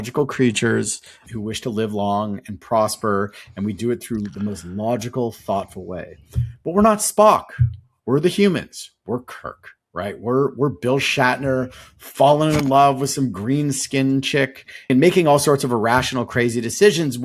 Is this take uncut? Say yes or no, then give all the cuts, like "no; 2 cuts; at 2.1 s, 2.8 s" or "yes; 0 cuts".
no; 2 cuts; at 1.2 s, 14.9 s